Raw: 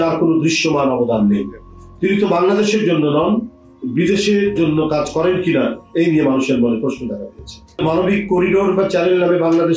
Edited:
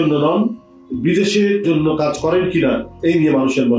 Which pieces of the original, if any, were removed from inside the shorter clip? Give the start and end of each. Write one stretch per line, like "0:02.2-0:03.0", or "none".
none